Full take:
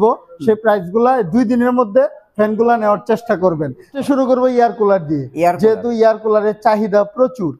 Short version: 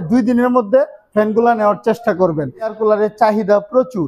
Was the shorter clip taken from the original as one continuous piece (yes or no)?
no